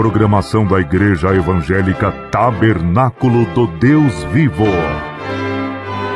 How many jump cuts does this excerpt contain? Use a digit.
1